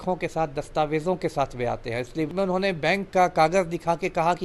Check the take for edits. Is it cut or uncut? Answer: cut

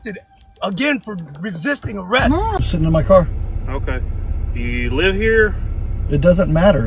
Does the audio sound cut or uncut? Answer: cut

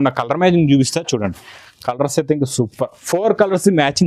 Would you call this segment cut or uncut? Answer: uncut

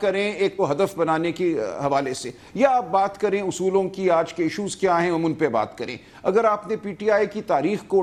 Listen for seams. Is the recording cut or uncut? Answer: uncut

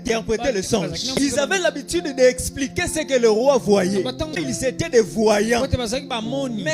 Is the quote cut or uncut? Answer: cut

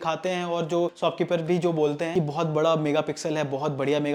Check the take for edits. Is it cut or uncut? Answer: cut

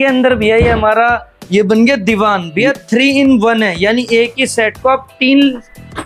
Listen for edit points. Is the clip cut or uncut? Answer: uncut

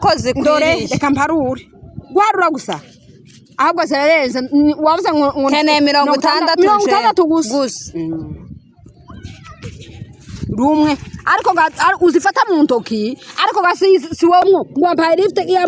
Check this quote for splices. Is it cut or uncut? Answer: cut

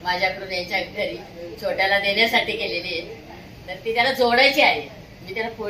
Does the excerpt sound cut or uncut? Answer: uncut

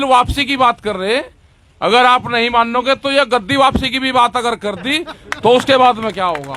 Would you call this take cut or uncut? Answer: uncut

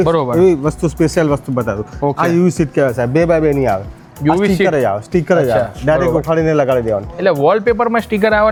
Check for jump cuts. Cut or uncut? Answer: uncut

